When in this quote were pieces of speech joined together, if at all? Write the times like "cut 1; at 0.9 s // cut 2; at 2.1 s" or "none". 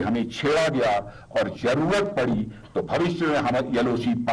none

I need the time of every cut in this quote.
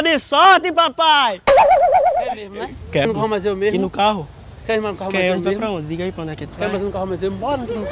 cut 1; at 3.2 s

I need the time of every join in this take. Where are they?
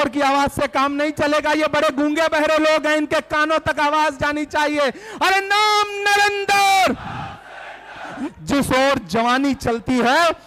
cut 1; at 8.2 s

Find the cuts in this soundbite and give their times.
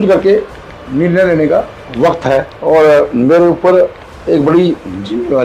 cut 1; at 2.5 s // cut 2; at 4.1 s

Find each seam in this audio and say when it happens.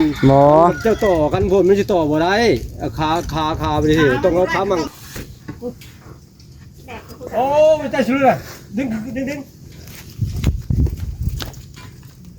cut 1; at 4.9 s

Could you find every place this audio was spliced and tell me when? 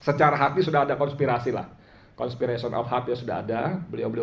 none

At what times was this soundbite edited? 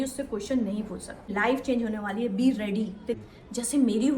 cut 1; at 1.3 s

